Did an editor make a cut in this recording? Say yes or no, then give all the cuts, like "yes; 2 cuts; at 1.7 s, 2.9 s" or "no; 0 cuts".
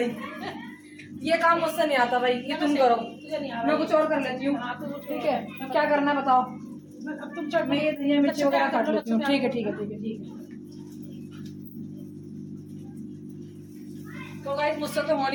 no; 0 cuts